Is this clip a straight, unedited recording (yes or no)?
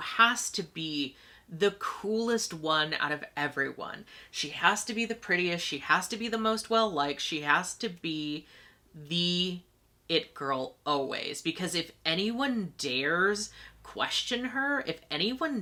yes